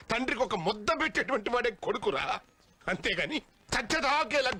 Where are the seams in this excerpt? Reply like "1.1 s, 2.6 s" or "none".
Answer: none